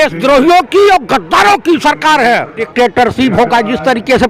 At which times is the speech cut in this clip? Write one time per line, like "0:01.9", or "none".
0:02.6